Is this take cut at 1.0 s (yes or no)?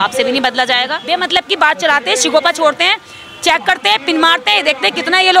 yes